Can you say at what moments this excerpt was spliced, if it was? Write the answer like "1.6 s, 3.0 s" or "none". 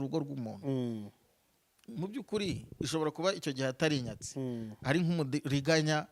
none